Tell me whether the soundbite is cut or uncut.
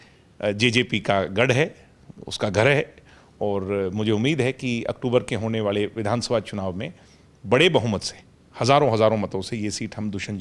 uncut